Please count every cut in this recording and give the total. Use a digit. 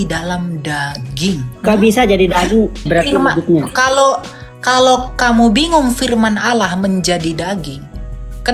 2